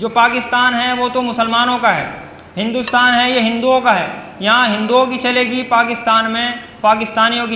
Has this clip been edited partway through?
no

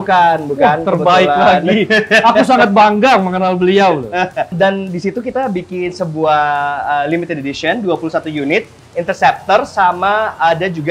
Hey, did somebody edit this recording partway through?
no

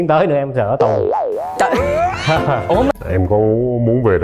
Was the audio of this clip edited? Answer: yes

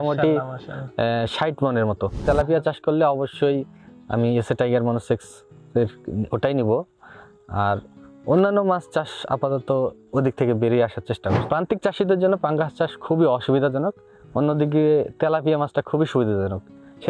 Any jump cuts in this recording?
yes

